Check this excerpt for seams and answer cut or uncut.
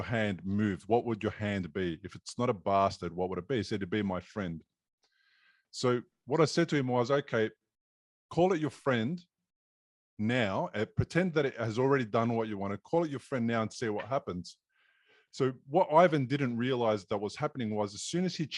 uncut